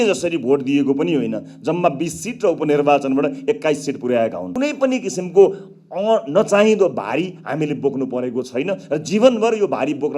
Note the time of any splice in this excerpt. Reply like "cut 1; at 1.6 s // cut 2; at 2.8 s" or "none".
cut 1; at 4.4 s